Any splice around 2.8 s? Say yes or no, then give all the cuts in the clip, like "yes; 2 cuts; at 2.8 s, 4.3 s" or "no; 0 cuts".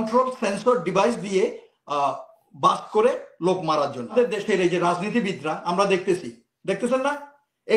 no; 1 cut; at 4.1 s